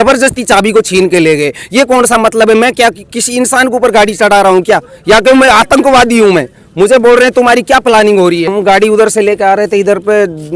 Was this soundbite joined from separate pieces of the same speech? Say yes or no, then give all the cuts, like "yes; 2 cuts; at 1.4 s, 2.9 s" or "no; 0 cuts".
yes; 1 cut; at 8.5 s